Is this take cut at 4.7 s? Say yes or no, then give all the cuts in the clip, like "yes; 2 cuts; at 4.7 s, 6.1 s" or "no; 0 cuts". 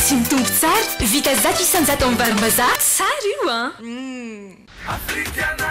yes; 1 cut; at 4.7 s